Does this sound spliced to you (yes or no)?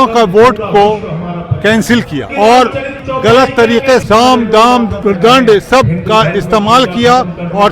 yes